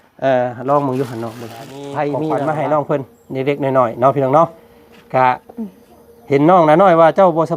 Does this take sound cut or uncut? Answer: cut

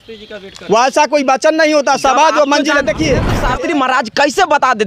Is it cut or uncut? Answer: cut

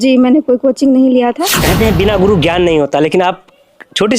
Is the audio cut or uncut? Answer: cut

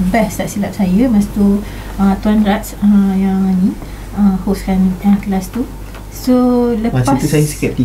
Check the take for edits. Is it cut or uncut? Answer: uncut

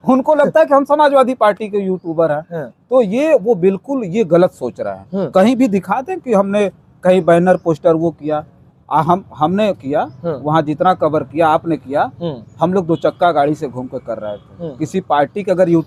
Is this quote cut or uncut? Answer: uncut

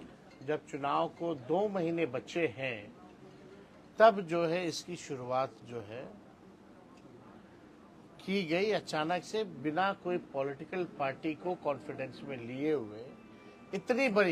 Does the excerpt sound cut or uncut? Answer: uncut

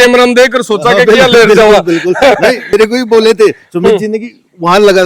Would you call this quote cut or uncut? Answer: cut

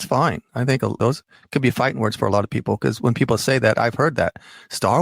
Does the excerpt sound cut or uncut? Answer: cut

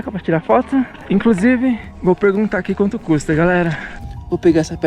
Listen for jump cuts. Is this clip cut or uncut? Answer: cut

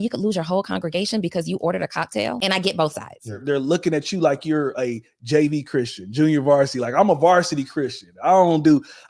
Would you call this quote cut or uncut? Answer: cut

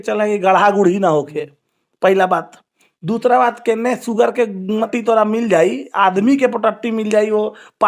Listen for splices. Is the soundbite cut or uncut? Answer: cut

